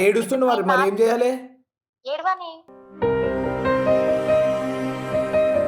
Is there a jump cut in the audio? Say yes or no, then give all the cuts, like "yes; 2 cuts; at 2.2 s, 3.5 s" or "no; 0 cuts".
no; 0 cuts